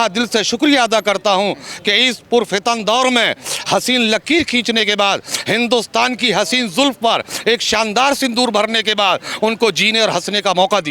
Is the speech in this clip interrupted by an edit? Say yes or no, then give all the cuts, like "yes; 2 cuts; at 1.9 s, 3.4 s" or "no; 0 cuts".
no; 0 cuts